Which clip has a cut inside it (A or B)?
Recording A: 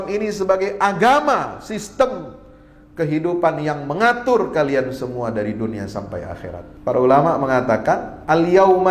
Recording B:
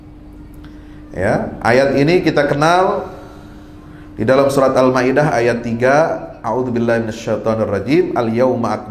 A